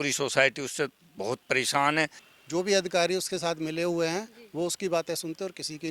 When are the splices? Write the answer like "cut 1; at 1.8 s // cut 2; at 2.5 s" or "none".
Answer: cut 1; at 2.2 s